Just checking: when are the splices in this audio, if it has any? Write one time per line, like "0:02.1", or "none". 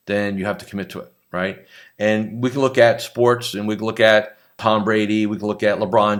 none